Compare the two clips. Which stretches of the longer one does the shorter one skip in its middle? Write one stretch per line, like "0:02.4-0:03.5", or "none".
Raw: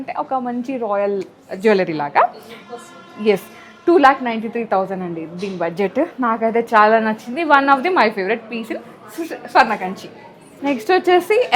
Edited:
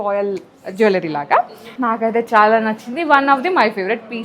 0:02.6-0:06.1